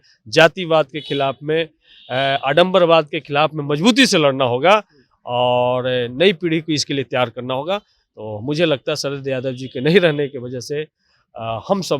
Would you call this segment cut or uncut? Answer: uncut